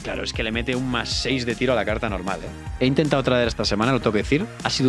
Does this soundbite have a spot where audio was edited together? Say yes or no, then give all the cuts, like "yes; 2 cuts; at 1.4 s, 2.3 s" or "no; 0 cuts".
no; 0 cuts